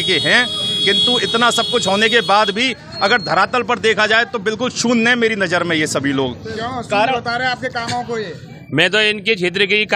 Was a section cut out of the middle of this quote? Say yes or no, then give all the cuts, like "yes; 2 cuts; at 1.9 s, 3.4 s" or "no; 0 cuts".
no; 0 cuts